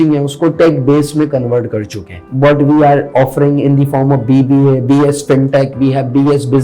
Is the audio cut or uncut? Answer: cut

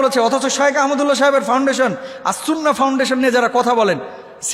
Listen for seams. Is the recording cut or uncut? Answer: uncut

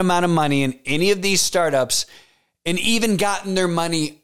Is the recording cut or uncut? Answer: uncut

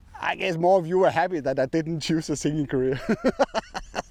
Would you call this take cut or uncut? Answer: uncut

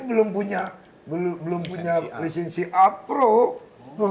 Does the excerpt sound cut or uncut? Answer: uncut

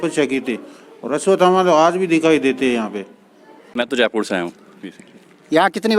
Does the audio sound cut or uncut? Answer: cut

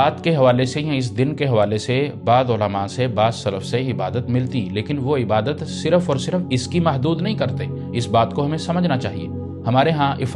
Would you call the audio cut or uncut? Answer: uncut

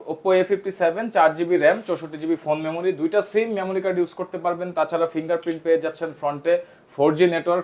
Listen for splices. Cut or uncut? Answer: uncut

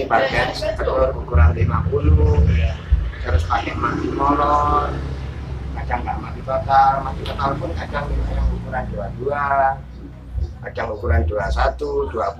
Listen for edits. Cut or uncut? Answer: uncut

